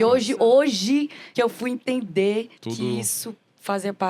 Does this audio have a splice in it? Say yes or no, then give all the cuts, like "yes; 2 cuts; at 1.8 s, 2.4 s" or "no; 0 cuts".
yes; 2 cuts; at 1.2 s, 2.6 s